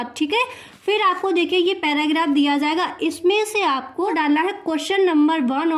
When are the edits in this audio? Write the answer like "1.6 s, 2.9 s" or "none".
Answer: 4.1 s